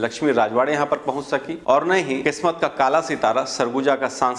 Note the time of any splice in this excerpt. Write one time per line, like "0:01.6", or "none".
0:01.5
0:02.2